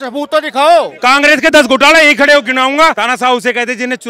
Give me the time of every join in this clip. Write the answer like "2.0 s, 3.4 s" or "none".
0.9 s, 3.0 s